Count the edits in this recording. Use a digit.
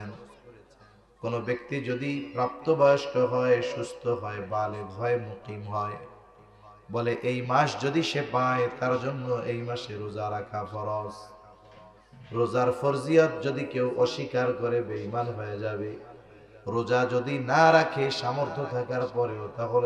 0